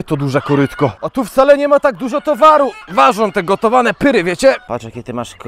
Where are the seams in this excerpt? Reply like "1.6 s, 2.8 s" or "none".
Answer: 1.0 s, 2.8 s, 4.6 s